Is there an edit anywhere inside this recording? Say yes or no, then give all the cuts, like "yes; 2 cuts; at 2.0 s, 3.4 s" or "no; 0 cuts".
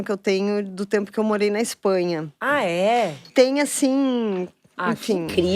yes; 1 cut; at 3.3 s